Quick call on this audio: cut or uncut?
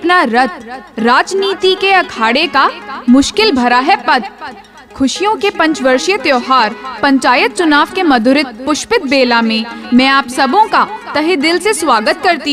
uncut